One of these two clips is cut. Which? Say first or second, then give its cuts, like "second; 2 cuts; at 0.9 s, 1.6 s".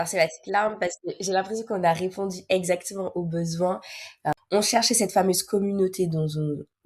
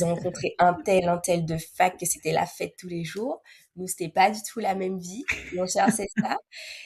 first; 1 cut; at 4.2 s